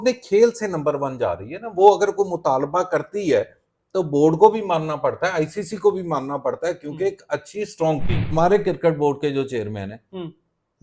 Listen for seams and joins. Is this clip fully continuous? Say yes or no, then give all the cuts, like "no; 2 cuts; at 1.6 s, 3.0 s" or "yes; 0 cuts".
no; 1 cut; at 8.2 s